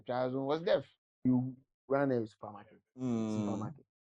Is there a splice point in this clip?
yes; 1 cut; at 1.2 s

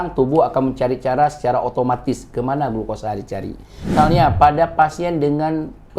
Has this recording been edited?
yes; 1 cut; at 3.9 s

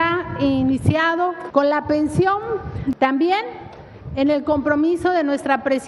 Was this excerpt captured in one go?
no; 2 cuts; at 1.4 s, 2.9 s

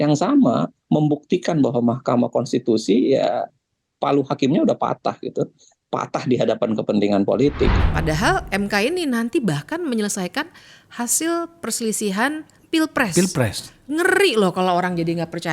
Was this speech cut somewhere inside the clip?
yes; 1 cut; at 7.9 s

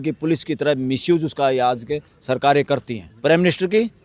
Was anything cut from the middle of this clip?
yes; 1 cut; at 3.0 s

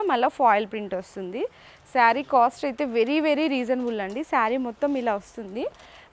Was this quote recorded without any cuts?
yes; 0 cuts

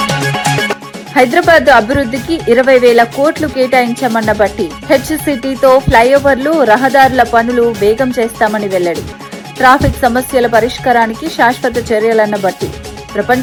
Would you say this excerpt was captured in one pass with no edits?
yes; 0 cuts

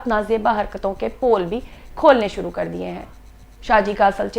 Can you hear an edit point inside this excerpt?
no; 0 cuts

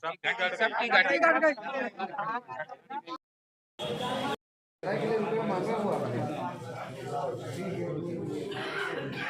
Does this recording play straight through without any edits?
yes; 0 cuts

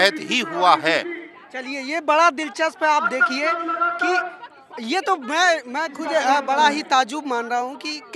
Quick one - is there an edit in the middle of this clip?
no; 0 cuts

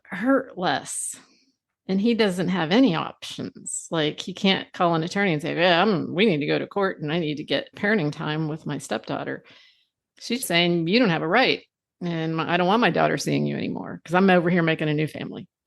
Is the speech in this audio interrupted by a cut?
yes; 2 cuts; at 7.7 s, 10.4 s

